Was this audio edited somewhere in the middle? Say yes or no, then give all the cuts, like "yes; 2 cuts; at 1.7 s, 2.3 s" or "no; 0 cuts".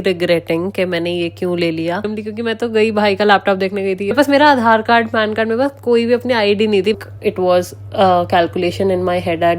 yes; 3 cuts; at 2.0 s, 4.1 s, 7.0 s